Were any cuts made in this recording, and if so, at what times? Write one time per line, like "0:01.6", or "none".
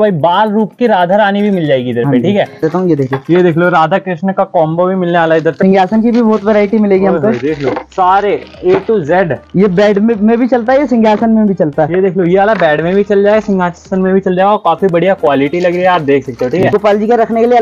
0:02.6
0:05.6
0:16.6